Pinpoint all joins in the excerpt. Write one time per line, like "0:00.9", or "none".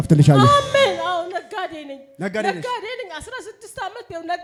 none

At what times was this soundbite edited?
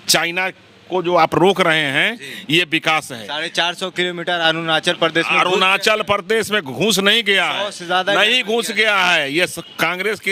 none

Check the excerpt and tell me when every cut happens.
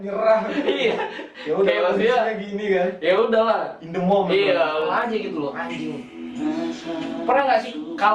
0:04.9

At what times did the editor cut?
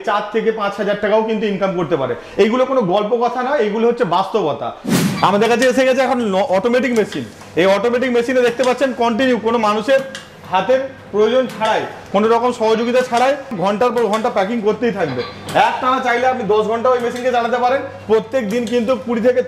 0:05.0
0:13.5

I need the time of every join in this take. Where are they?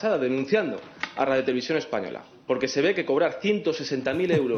none

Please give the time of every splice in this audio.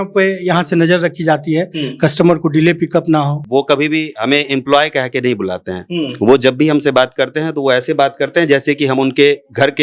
0:03.5

